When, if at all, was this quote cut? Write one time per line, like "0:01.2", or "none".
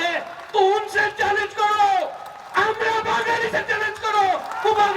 none